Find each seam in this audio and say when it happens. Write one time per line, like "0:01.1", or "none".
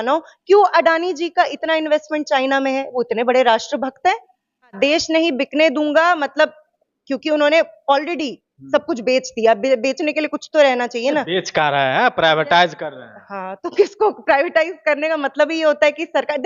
0:04.8